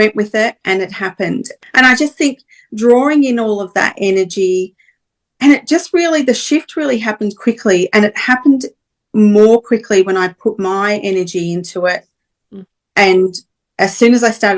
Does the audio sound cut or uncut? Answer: cut